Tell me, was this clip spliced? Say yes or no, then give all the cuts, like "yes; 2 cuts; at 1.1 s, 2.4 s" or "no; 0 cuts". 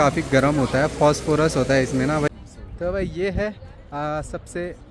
yes; 1 cut; at 2.3 s